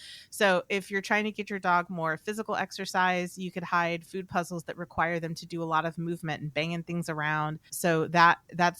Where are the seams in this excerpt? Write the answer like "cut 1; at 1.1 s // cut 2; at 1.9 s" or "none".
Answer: cut 1; at 7.7 s